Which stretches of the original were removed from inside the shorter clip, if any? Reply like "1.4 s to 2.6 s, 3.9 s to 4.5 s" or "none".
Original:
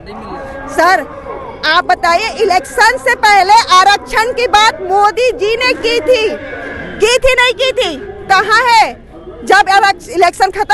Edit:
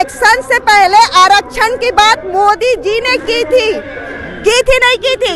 none